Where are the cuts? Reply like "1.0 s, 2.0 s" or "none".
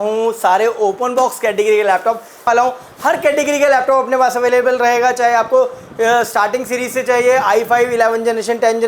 2.5 s